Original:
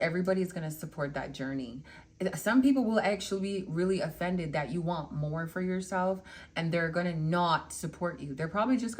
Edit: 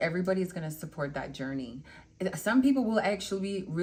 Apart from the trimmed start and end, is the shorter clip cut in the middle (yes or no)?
no